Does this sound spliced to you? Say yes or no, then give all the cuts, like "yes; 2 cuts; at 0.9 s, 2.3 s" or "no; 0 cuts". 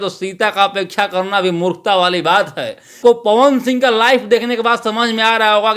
yes; 1 cut; at 3.0 s